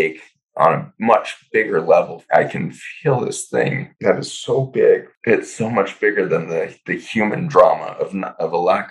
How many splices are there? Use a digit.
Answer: 3